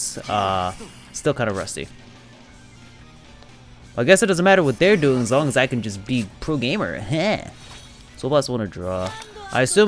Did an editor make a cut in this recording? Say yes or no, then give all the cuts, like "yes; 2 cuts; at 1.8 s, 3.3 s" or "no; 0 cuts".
no; 0 cuts